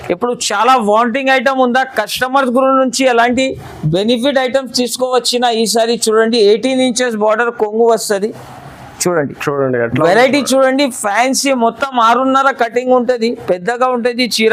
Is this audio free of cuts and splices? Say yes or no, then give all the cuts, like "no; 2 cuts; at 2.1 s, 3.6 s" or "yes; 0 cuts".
yes; 0 cuts